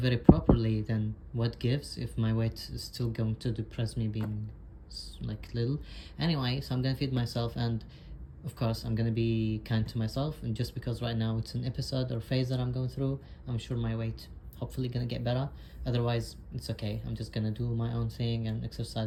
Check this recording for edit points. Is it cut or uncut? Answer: uncut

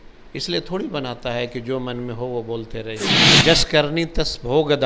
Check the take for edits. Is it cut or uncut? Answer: cut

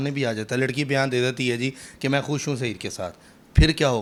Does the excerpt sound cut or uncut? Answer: uncut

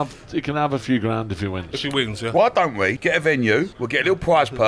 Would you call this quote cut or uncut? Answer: cut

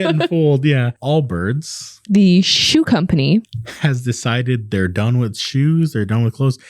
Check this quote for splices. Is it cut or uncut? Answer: cut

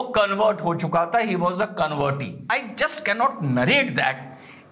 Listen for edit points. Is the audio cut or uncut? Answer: cut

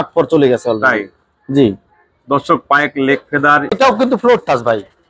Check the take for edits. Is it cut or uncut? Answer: cut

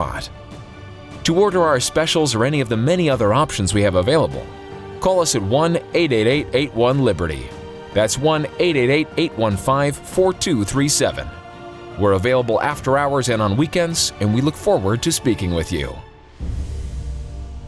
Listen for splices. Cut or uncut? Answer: cut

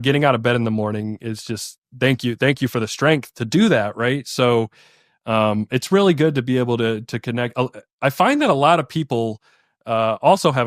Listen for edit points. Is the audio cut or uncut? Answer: uncut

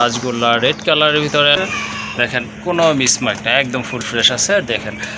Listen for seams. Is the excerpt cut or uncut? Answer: cut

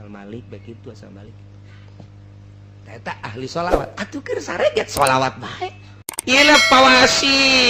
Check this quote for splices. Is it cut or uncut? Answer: cut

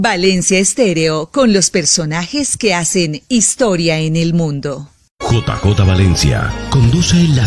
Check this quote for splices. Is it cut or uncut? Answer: cut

